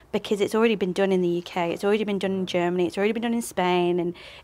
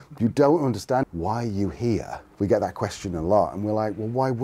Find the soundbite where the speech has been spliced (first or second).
second